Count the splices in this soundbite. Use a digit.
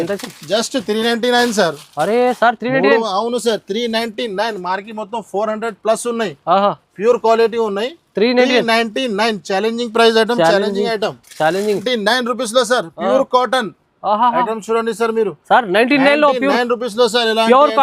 1